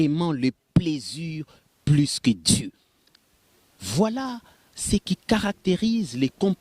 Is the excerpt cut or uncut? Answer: uncut